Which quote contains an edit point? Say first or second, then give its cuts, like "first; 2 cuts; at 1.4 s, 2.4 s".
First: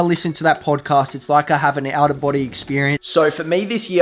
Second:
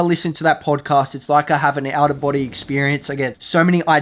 first; 1 cut; at 3.0 s